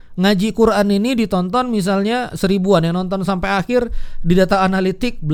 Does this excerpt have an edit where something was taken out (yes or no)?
no